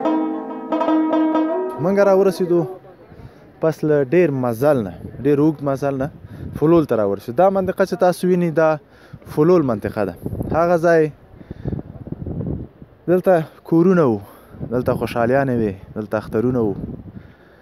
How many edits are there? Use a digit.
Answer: 1